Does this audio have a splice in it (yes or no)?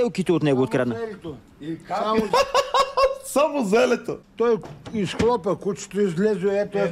yes